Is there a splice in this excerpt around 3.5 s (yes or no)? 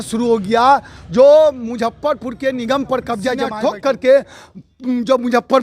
yes